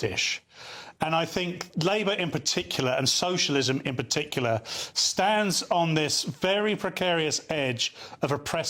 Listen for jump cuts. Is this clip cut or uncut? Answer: uncut